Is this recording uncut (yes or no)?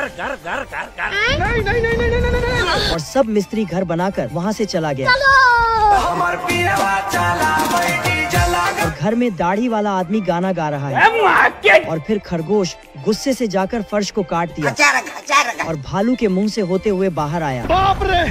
yes